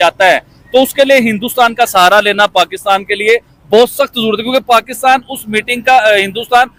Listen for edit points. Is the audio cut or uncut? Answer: uncut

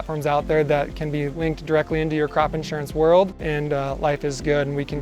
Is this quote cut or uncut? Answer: cut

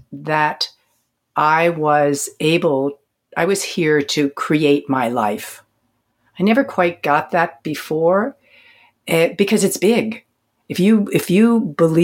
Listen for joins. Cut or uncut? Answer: uncut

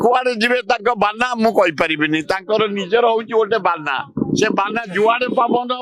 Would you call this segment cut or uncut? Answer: uncut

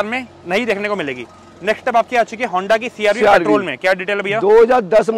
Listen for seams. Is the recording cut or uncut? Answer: uncut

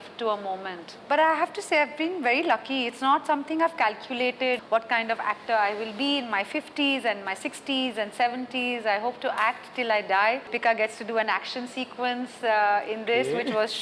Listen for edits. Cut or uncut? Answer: cut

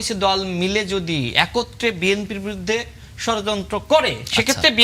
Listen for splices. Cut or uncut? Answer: uncut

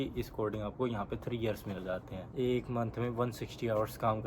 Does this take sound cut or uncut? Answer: cut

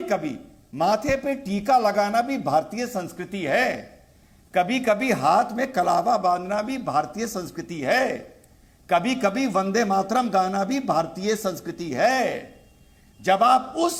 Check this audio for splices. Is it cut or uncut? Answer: uncut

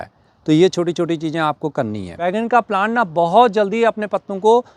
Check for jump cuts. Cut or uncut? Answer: cut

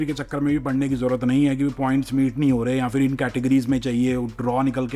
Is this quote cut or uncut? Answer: uncut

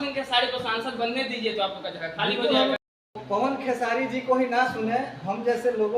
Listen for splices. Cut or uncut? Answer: cut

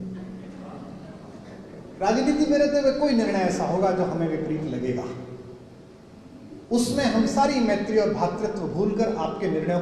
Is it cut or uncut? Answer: uncut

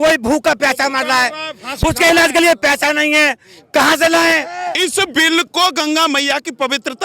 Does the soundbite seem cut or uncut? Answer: cut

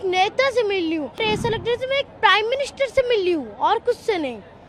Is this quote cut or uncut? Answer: cut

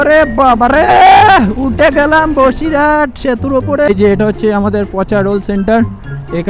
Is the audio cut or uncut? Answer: cut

